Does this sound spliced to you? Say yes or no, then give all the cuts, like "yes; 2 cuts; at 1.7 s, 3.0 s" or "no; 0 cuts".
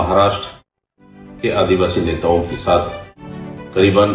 no; 0 cuts